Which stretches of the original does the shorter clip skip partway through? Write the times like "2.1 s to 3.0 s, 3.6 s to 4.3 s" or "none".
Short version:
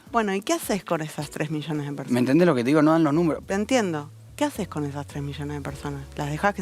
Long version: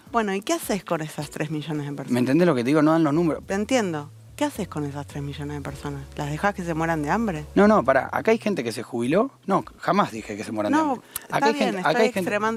none